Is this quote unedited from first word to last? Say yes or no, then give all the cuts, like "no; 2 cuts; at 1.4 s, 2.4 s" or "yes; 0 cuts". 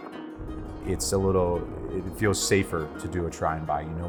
yes; 0 cuts